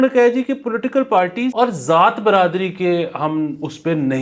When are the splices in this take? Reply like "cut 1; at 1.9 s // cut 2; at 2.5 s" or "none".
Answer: cut 1; at 1.5 s

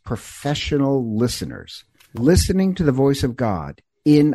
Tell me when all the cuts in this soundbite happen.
cut 1; at 2.1 s

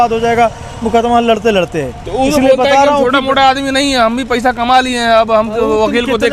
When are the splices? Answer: none

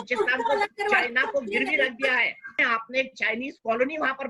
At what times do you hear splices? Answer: cut 1; at 2.6 s

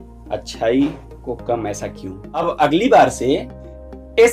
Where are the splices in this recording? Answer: cut 1; at 2.3 s

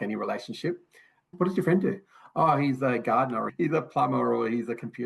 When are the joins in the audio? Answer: cut 1; at 1.3 s

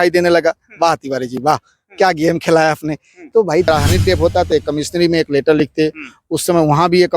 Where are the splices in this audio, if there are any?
cut 1; at 3.7 s

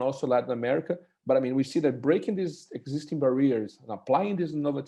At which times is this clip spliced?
none

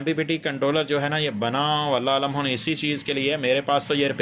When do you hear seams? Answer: none

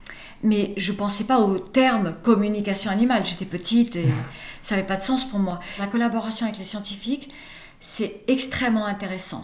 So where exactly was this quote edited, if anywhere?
cut 1; at 5.8 s

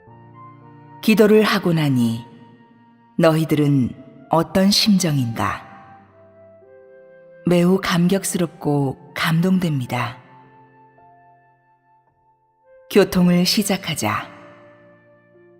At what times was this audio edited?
cut 1; at 1.0 s // cut 2; at 1.6 s

